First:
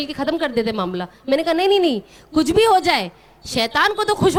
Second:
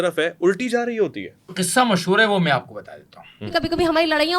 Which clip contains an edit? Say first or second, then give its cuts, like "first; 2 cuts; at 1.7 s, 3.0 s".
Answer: second; 2 cuts; at 1.6 s, 3.5 s